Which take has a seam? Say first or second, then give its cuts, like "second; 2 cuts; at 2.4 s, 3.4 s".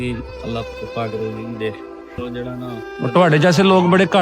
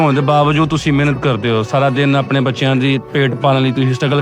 first; 1 cut; at 2.3 s